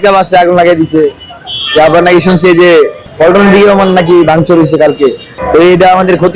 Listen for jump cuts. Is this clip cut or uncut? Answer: cut